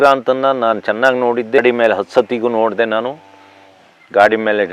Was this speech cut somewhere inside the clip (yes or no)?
yes